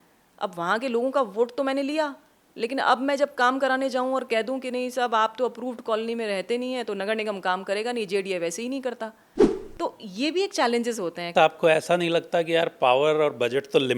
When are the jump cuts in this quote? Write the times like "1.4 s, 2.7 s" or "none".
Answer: 11.3 s